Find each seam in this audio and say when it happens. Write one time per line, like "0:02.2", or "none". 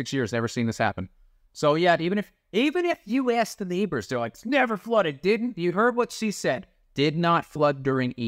none